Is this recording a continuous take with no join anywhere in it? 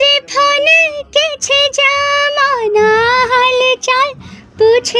yes; 0 cuts

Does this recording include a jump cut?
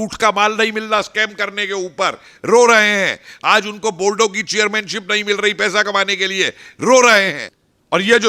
yes; 1 cut; at 7.4 s

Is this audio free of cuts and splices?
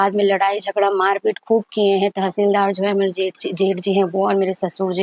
yes; 0 cuts

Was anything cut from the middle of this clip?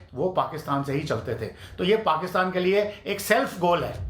no; 0 cuts

